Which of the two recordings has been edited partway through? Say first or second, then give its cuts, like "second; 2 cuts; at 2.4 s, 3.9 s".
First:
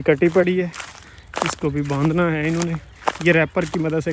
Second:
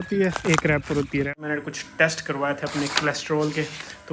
second; 1 cut; at 1.4 s